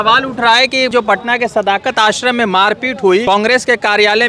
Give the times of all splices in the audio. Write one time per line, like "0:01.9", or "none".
0:00.9
0:03.2